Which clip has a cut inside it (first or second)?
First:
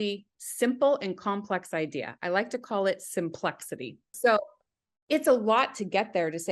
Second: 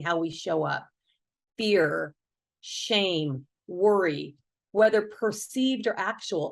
first